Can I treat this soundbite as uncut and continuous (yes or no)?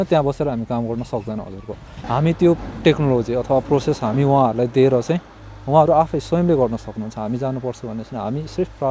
no